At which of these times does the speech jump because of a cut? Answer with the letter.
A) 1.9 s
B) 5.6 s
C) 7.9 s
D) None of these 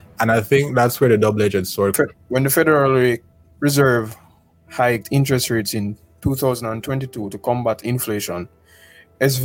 A